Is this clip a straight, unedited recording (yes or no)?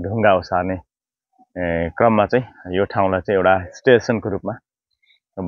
yes